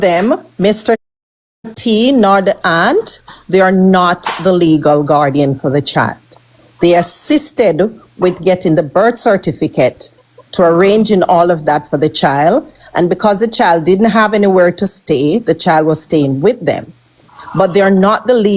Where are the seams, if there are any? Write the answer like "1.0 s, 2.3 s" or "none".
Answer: none